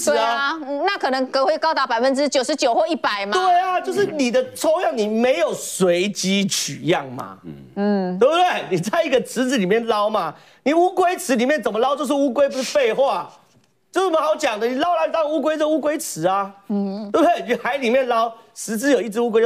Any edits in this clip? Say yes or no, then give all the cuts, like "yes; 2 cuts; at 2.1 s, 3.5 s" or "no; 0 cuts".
no; 0 cuts